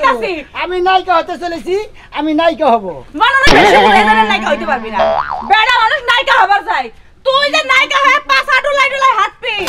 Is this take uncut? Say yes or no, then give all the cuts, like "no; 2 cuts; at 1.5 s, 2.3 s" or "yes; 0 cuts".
yes; 0 cuts